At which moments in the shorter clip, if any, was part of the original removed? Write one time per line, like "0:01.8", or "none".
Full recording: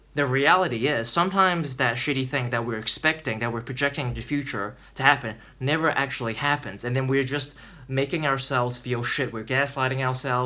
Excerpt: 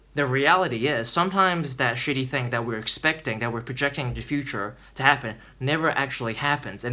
none